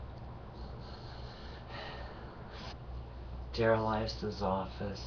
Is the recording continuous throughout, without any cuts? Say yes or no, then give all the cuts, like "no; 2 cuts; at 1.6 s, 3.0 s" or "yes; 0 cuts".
yes; 0 cuts